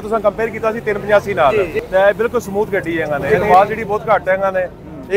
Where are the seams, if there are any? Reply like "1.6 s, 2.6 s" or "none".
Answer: 1.5 s, 3.2 s